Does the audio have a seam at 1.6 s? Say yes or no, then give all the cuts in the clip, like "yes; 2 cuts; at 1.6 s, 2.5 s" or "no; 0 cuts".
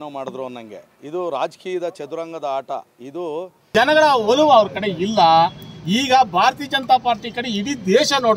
no; 1 cut; at 3.5 s